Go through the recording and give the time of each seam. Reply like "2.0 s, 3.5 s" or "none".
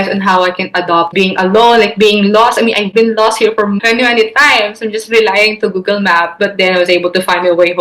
1.1 s, 3.8 s